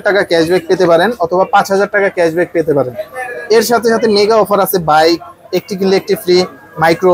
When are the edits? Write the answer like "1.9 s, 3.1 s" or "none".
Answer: none